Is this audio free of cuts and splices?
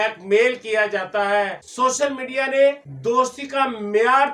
no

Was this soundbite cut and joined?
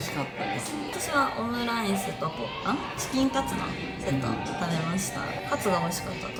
no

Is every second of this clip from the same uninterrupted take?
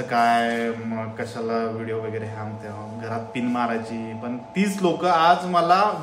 yes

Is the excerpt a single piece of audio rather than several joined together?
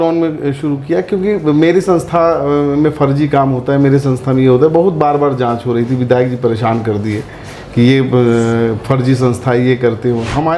yes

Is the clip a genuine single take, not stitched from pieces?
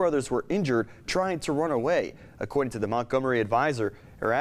yes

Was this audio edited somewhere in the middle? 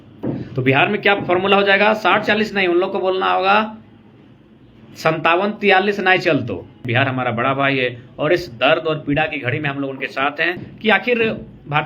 yes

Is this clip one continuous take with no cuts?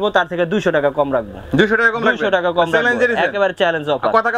yes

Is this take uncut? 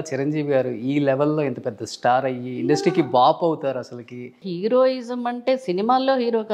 no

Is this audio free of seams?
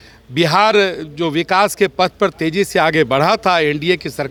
yes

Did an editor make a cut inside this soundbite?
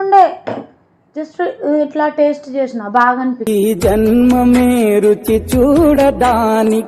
yes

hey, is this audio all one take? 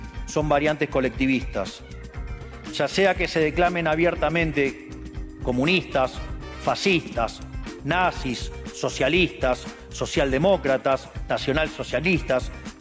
yes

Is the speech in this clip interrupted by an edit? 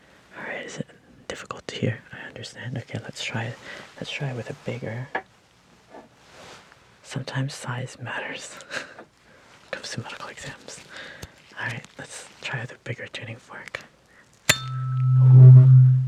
no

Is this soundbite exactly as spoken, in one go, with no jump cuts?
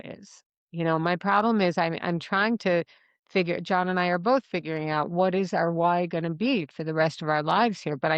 yes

